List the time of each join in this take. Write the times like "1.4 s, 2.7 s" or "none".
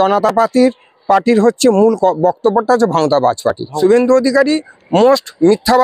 3.7 s